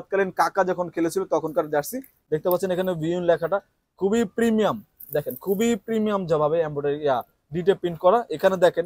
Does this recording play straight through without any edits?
yes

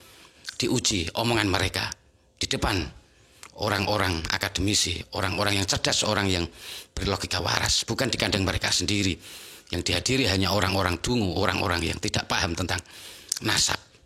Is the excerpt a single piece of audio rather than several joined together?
yes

